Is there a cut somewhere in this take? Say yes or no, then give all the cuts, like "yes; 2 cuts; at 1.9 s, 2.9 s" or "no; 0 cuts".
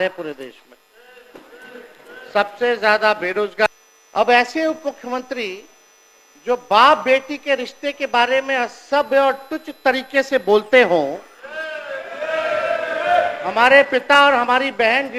yes; 1 cut; at 3.7 s